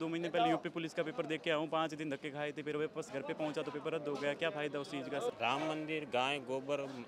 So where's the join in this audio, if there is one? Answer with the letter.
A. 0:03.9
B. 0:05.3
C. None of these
B